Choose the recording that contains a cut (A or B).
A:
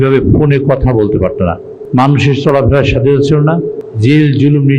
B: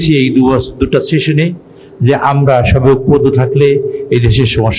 A